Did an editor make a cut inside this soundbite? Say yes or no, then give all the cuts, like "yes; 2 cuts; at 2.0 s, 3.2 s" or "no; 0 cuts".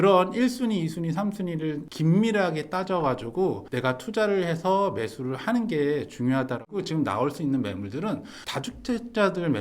yes; 1 cut; at 6.8 s